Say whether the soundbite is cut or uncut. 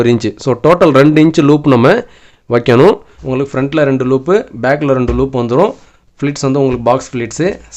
cut